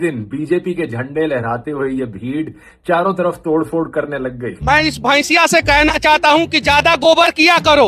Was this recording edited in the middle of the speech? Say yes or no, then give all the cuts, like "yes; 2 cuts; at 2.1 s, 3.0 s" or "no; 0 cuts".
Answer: yes; 1 cut; at 4.7 s